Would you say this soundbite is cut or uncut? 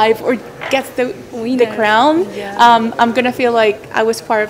uncut